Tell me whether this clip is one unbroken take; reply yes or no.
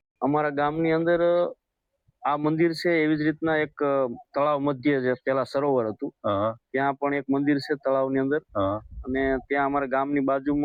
yes